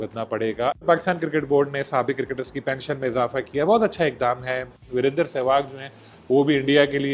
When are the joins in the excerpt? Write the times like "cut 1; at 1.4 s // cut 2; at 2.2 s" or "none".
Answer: cut 1; at 0.9 s // cut 2; at 4.8 s